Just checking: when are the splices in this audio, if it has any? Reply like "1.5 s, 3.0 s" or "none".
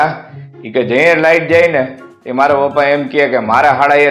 none